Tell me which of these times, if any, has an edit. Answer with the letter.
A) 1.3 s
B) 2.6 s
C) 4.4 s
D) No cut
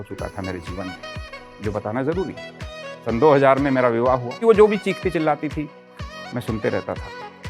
C